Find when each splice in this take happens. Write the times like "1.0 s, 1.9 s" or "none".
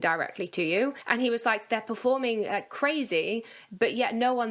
1.0 s